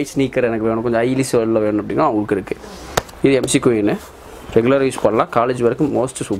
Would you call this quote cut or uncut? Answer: uncut